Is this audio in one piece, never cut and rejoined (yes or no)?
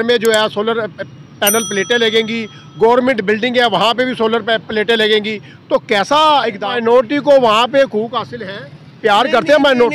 no